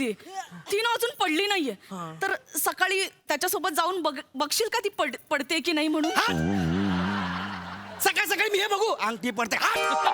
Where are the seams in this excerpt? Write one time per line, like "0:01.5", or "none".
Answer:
none